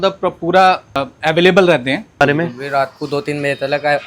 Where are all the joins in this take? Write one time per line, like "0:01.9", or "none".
0:01.1
0:02.2